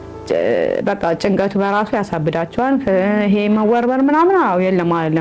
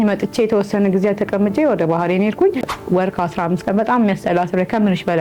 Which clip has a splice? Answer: second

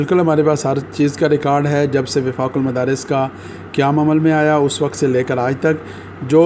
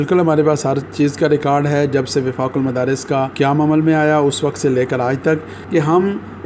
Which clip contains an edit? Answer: second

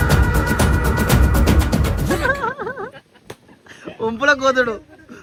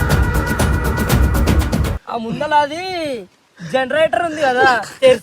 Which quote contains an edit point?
second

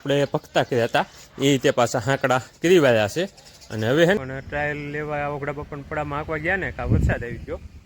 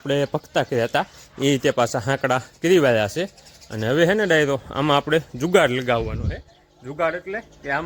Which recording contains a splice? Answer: first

